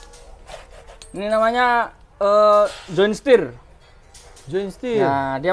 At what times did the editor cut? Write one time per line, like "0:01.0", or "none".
none

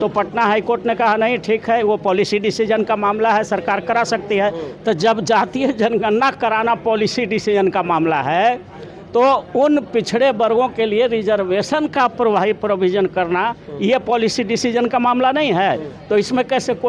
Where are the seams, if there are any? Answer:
none

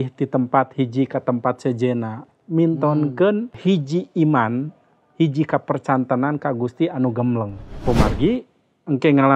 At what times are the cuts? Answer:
0:03.6
0:07.6

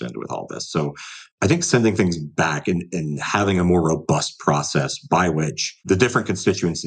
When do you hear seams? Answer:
0:05.8

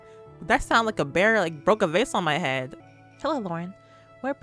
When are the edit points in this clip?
0:02.8

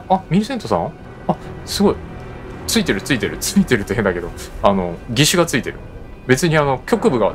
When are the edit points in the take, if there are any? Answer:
0:01.1
0:05.0

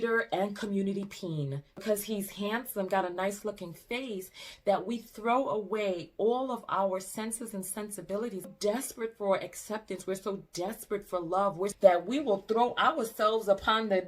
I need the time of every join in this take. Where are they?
0:01.8
0:08.5
0:11.7

